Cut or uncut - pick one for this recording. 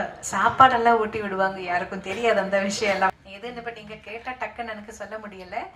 cut